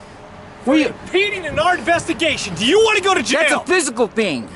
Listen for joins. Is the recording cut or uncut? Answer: uncut